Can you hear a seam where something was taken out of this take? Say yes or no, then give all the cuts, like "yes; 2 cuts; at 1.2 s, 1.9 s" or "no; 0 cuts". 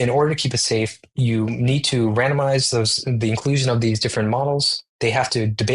no; 0 cuts